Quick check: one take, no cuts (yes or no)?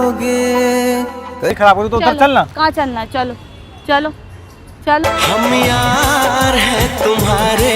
no